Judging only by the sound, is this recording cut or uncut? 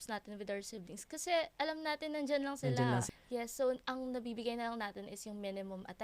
cut